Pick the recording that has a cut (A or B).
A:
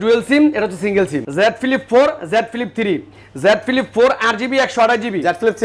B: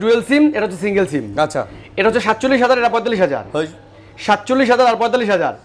A